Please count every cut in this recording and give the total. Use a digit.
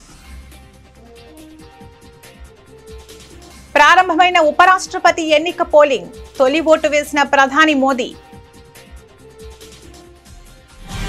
0